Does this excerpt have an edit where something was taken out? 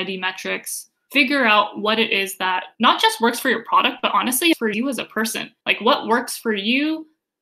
no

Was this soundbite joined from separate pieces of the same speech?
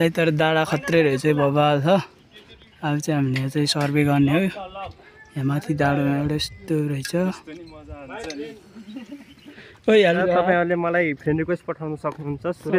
yes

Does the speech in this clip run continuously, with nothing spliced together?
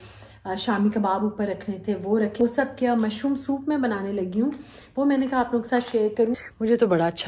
no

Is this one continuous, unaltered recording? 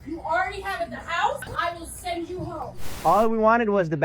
no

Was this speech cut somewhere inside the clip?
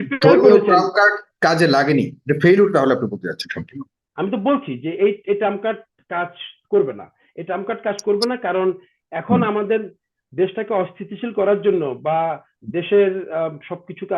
yes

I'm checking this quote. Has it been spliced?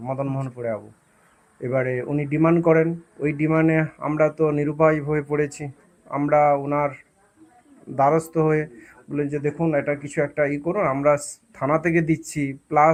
no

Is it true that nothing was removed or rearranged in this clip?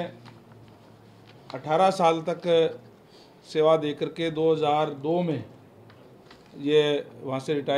yes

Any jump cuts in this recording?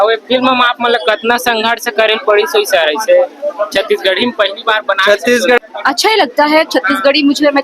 yes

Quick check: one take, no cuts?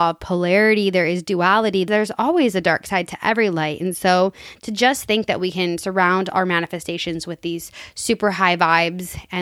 no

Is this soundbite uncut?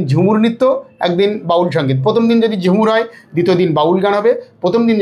yes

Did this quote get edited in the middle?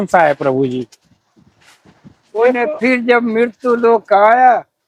yes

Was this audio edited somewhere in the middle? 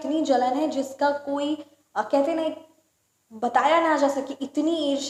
no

